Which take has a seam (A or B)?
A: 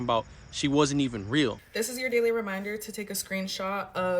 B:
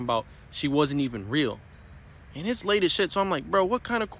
A